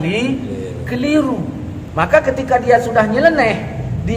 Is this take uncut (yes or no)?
no